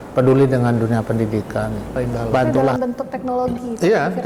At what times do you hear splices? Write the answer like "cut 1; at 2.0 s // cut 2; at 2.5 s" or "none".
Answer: cut 1; at 2.7 s